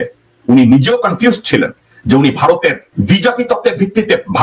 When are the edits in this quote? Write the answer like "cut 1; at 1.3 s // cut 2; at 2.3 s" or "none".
cut 1; at 2.9 s